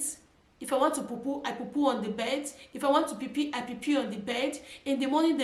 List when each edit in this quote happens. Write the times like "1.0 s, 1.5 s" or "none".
none